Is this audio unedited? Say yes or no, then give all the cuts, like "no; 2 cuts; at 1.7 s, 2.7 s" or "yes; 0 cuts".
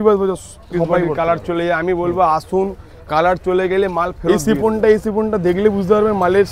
no; 2 cuts; at 1.1 s, 4.2 s